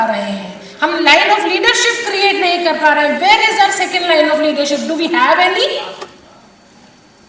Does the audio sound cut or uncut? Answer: uncut